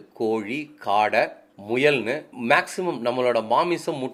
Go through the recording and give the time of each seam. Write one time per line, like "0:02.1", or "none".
none